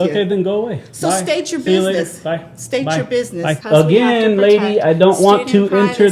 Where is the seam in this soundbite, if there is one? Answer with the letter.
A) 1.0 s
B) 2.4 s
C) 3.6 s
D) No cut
C